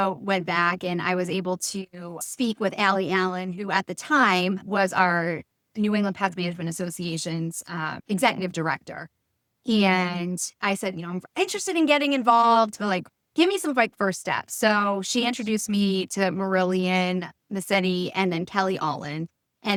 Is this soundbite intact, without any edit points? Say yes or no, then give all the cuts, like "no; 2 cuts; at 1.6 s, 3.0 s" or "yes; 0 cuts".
yes; 0 cuts